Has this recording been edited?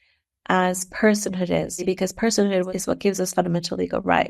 yes; 2 cuts; at 1.8 s, 2.7 s

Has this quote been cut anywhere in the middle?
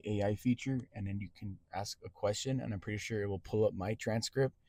no; 0 cuts

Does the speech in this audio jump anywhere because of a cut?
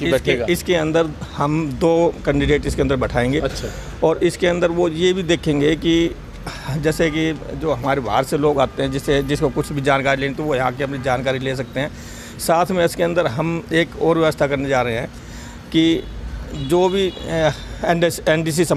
no; 0 cuts

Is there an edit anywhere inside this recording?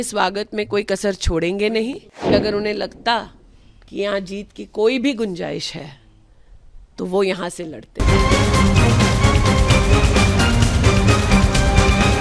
yes; 2 cuts; at 2.3 s, 8.0 s

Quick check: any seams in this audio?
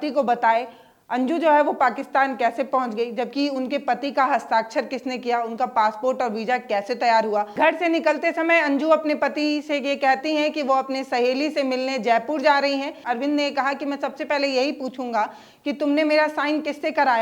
yes; 2 cuts; at 7.5 s, 13.0 s

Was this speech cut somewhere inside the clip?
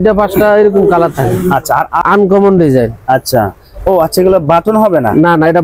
yes; 1 cut; at 2.0 s

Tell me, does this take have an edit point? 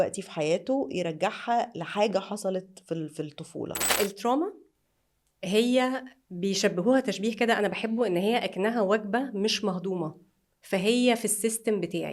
yes; 1 cut; at 3.8 s

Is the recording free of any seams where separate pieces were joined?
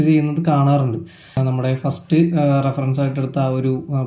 no; 1 cut; at 1.4 s

